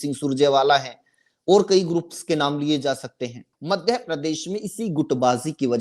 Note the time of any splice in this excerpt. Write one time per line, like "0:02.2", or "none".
0:03.5

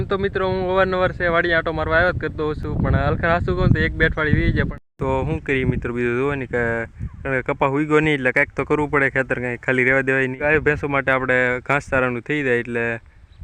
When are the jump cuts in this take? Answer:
0:04.7
0:10.4

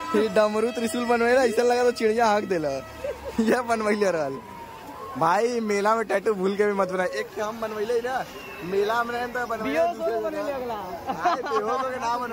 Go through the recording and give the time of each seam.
none

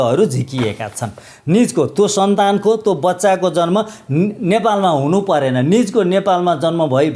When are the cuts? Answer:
none

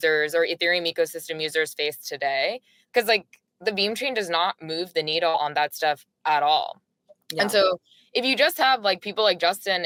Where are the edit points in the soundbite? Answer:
none

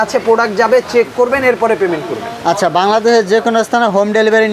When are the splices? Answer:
none

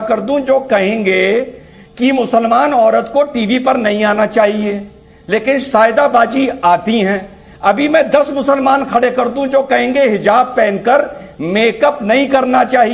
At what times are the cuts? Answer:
none

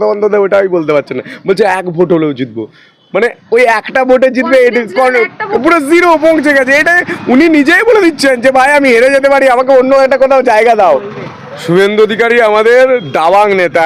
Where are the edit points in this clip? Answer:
0:10.8

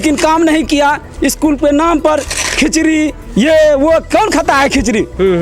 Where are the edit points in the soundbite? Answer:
none

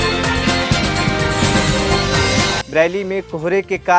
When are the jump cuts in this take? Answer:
0:02.6

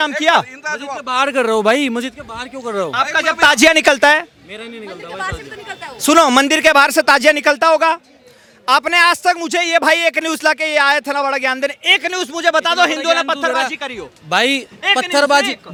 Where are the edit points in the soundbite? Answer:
none

